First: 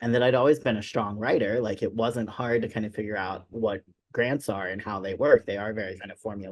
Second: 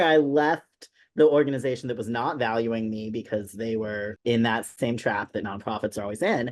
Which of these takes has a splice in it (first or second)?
second